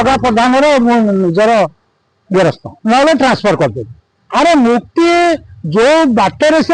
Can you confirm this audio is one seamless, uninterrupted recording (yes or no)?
no